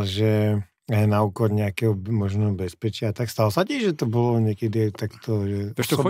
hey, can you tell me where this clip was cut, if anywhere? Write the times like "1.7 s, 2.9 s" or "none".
none